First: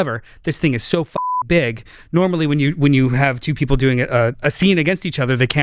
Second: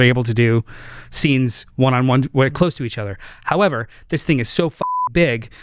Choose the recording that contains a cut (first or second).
first